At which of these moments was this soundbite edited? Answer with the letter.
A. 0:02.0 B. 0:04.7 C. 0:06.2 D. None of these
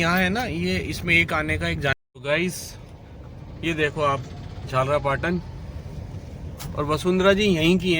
A